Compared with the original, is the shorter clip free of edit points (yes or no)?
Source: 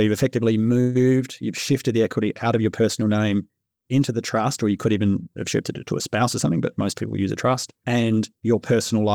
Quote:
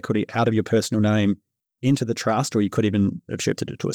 yes